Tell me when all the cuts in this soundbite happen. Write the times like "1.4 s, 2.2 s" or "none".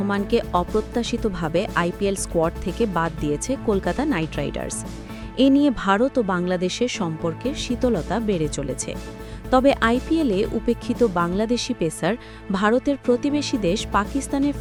none